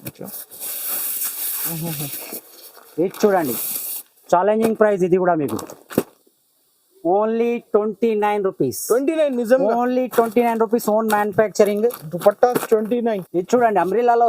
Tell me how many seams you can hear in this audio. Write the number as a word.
one